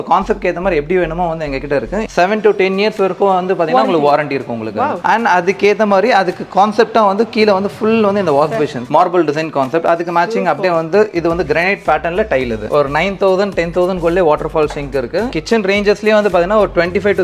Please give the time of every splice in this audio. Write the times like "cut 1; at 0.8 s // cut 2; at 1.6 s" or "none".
cut 1; at 2.1 s // cut 2; at 8.9 s // cut 3; at 12.7 s // cut 4; at 15.3 s